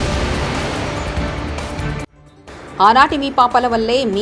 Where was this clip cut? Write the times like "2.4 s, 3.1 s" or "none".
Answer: none